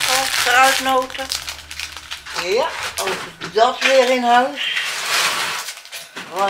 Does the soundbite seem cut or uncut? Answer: uncut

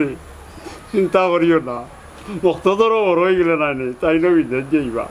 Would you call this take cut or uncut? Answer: uncut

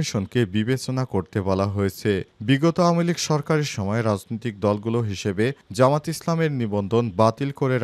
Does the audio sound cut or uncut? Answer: uncut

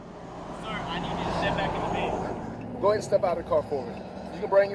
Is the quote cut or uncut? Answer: cut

